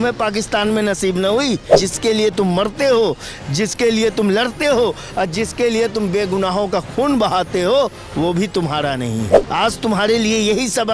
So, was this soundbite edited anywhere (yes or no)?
yes